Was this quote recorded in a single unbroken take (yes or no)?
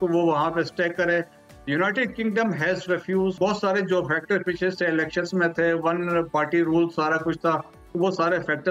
no